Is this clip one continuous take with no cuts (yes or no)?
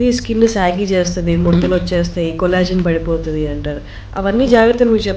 yes